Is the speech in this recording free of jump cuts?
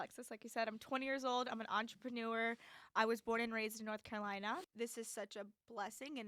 no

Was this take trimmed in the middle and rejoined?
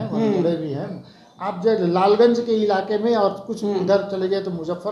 yes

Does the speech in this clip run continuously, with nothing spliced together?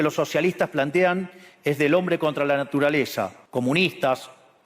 no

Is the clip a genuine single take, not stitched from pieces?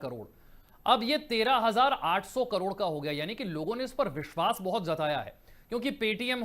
yes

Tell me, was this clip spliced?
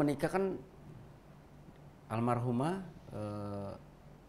no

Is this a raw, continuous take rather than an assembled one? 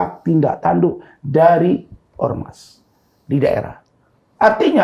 yes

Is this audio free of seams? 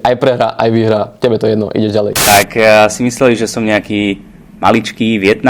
no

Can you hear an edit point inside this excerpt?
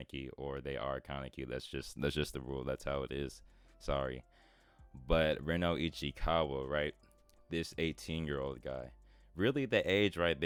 no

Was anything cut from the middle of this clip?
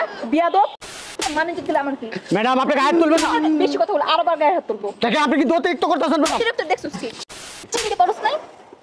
yes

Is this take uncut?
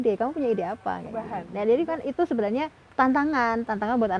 no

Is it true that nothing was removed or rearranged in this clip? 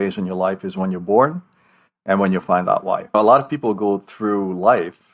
yes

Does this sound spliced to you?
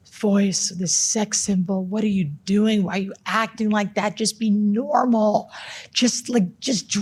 no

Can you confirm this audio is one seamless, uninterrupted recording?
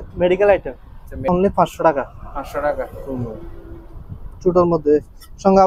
no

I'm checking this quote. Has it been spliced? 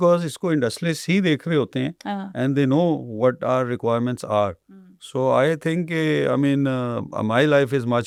no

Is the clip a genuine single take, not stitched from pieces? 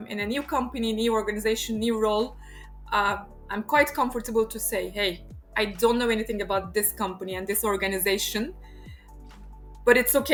yes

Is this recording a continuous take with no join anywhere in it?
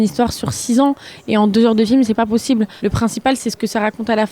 no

